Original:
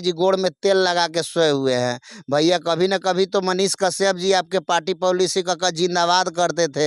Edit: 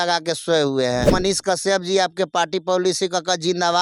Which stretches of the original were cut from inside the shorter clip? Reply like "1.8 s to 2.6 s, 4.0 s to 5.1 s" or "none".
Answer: 2.0 s to 3.5 s